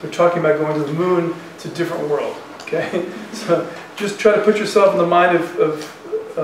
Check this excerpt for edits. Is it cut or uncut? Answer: uncut